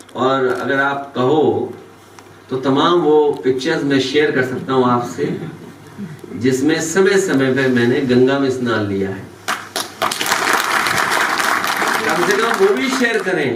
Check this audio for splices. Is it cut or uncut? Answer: uncut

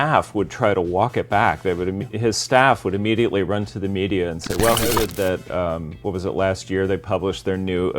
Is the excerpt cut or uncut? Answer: cut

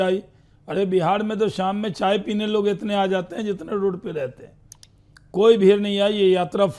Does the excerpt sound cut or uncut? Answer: uncut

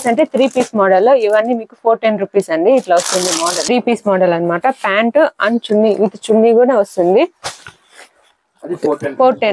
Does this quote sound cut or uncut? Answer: cut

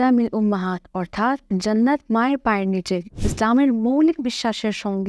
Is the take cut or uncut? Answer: cut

